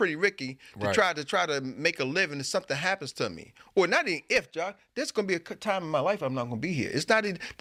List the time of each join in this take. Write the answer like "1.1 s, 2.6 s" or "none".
none